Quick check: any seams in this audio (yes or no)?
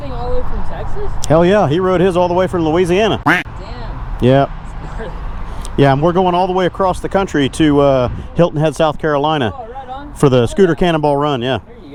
no